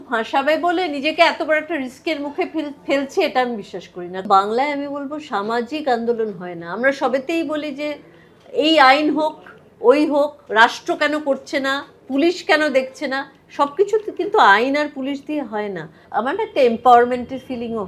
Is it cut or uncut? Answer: cut